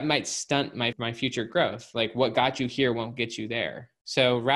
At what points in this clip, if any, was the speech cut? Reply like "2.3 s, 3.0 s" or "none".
0.9 s